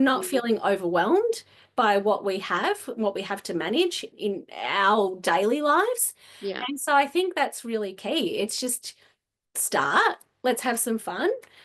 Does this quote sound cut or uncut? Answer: cut